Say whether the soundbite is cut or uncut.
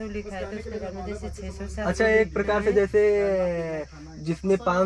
uncut